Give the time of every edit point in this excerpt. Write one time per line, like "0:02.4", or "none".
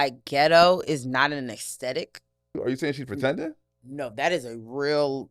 0:02.6